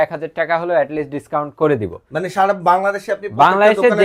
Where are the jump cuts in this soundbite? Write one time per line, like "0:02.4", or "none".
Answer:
none